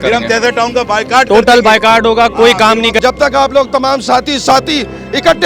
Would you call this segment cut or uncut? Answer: cut